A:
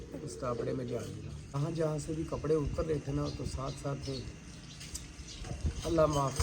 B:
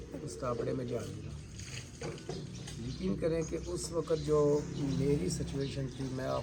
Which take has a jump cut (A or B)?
A